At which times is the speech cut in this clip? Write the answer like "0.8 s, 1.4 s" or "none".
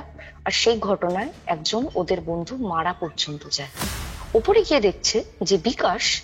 3.6 s